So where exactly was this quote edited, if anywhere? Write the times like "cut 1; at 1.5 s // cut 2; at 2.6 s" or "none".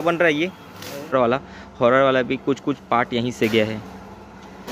cut 1; at 1.1 s